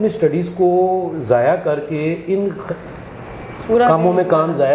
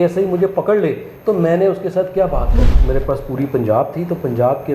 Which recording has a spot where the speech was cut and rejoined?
second; 1 cut; at 2.7 s

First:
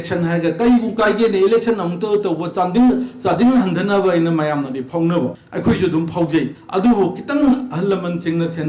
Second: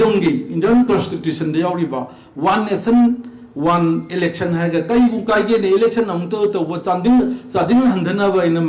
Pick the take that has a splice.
first; 2 cuts; at 5.4 s, 6.6 s

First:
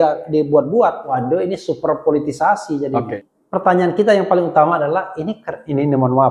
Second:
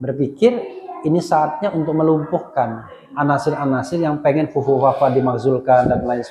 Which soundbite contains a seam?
first; 2 cuts; at 1.1 s, 3.2 s

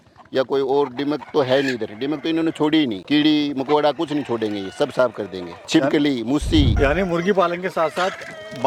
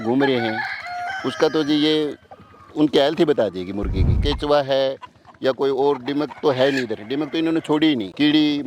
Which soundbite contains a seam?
second; 1 cut; at 4.2 s

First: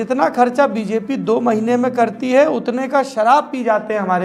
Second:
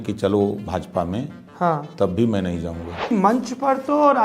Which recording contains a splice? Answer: second; 1 cut; at 3.1 s

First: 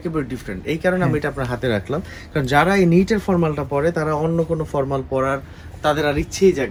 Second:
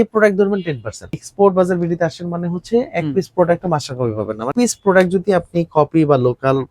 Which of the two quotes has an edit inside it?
second; 2 cuts; at 1.2 s, 4.5 s

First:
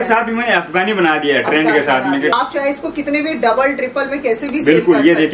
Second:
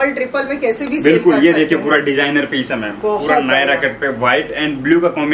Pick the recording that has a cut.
first; 1 cut; at 2.3 s

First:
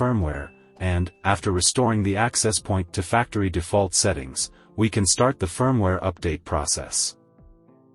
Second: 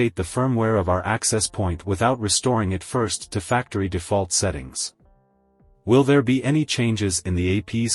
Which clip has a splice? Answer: first; 1 cut; at 7.0 s

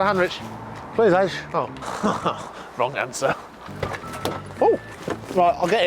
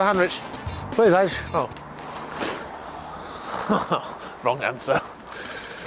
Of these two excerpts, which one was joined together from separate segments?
first; 3 cuts; at 1.8 s, 3.6 s, 4.9 s

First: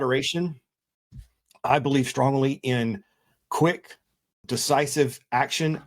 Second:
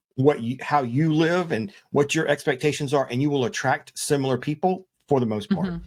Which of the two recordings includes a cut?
first; 1 cut; at 4.4 s

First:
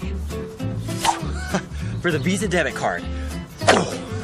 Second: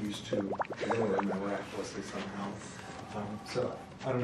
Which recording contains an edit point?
second; 1 cut; at 1.1 s

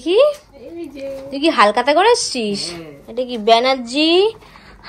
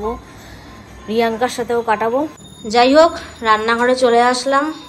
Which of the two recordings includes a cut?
second; 1 cut; at 2.6 s

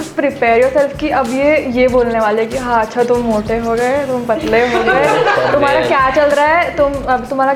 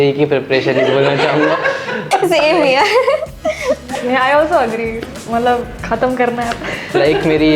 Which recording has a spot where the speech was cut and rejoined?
second; 1 cut; at 5.8 s

